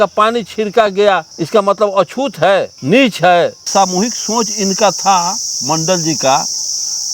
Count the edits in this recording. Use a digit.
1